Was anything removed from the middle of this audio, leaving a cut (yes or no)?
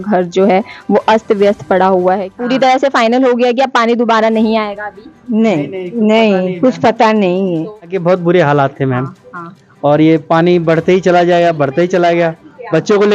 yes